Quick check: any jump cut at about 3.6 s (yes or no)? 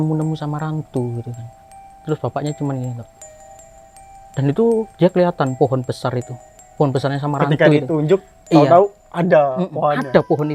no